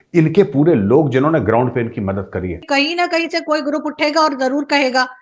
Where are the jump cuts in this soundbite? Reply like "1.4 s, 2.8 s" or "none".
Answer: 2.6 s

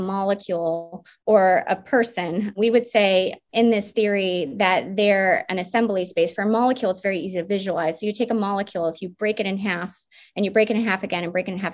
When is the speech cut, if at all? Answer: 2.5 s, 3.4 s

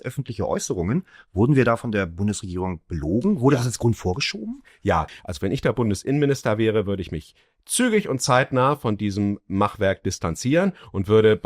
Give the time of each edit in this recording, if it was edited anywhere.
5.1 s

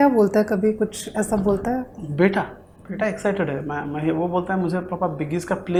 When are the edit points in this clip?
none

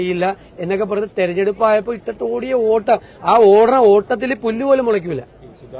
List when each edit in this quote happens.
none

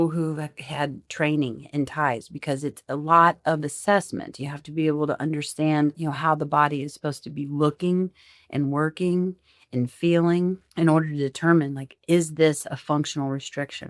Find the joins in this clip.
6.0 s, 10.6 s

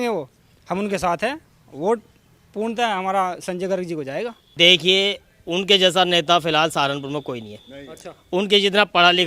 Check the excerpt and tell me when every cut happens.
4.4 s

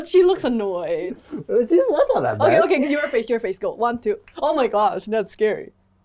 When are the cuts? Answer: 1.1 s

